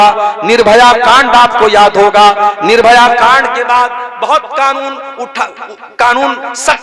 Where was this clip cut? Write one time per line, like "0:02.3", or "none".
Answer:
none